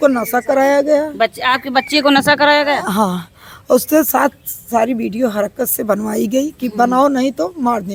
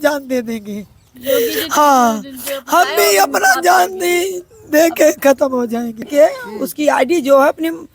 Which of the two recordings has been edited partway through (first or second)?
second